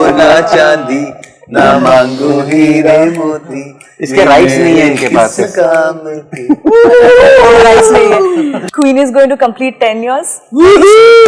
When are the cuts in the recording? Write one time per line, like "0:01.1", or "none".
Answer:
0:08.6